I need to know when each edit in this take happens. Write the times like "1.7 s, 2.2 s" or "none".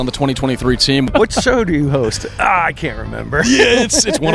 1.1 s